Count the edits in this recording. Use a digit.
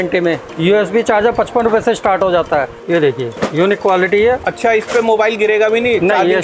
2